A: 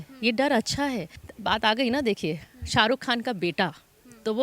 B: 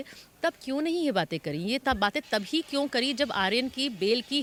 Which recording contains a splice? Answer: A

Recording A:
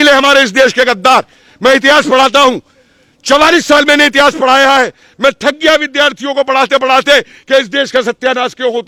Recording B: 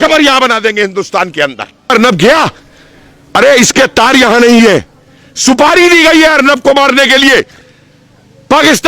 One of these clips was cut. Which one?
B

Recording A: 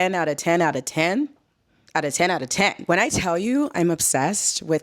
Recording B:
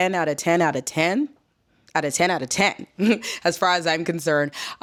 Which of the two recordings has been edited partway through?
A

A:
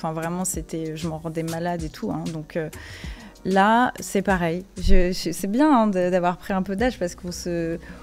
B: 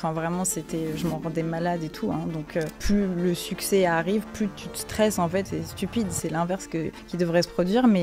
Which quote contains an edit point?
B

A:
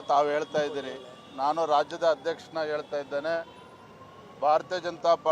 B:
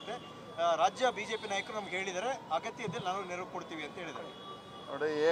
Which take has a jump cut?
A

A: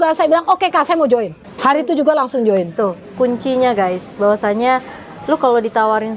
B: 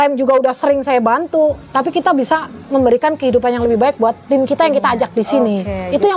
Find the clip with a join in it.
A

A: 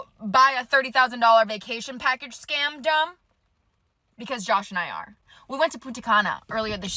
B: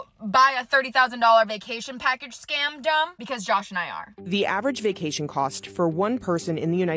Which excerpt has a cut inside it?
B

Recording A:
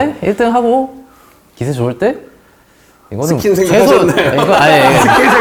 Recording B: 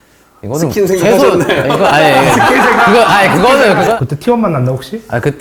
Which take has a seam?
B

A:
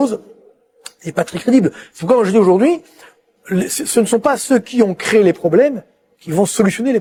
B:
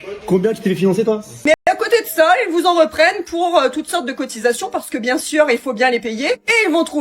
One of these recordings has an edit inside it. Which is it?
B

